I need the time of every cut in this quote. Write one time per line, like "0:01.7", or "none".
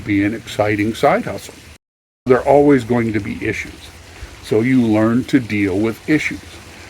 0:01.9